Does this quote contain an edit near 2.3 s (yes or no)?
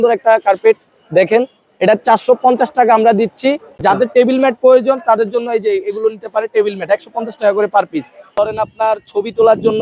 no